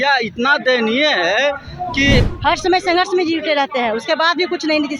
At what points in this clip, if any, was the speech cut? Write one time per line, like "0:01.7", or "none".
0:02.3